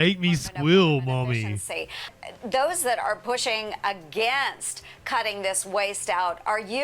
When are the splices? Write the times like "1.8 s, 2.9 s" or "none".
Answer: 2.1 s